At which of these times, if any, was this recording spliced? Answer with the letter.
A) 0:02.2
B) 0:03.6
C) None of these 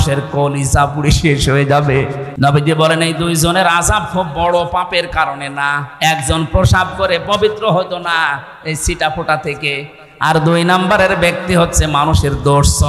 A